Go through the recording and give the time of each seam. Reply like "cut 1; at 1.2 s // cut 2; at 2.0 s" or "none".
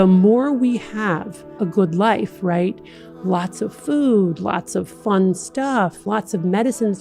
cut 1; at 1.4 s